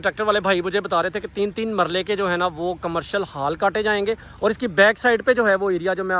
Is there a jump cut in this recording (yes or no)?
no